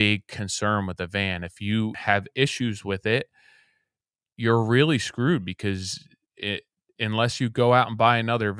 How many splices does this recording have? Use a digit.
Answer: 1